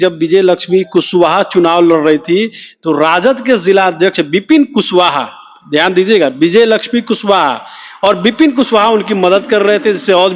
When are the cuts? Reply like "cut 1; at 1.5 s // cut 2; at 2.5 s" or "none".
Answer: none

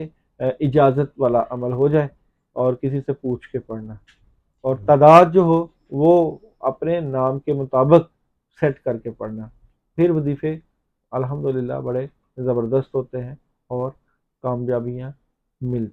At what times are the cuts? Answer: none

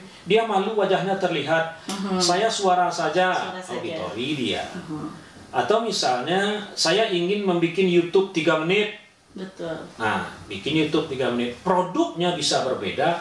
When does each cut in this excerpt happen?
none

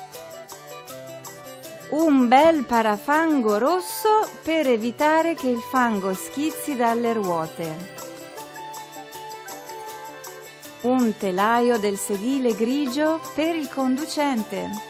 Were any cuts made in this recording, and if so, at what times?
none

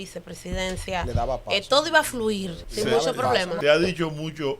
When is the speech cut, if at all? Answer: cut 1; at 2.6 s // cut 2; at 3.5 s

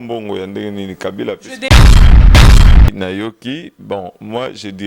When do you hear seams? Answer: cut 1; at 1.6 s // cut 2; at 2.9 s

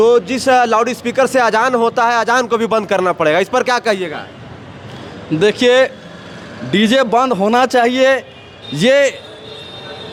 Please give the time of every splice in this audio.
none

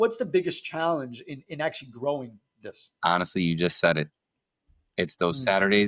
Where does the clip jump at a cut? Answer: none

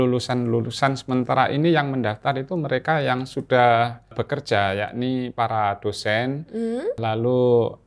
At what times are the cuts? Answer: cut 1; at 4.2 s // cut 2; at 7.0 s

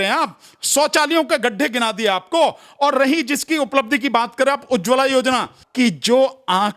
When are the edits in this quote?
cut 1; at 5.6 s

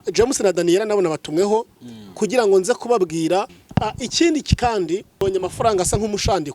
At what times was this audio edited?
cut 1; at 3.6 s // cut 2; at 5.2 s

